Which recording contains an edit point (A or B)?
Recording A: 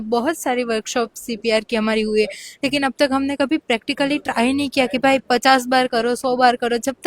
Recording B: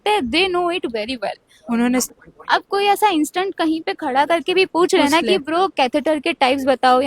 B